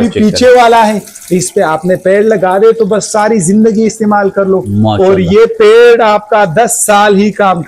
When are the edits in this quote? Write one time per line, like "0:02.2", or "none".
none